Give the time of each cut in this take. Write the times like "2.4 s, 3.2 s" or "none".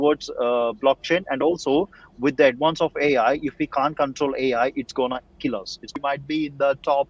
5.9 s